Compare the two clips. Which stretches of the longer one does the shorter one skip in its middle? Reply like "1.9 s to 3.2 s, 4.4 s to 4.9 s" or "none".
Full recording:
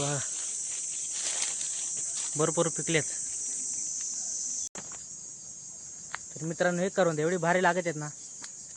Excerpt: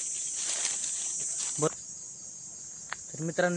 2.5 s to 4.9 s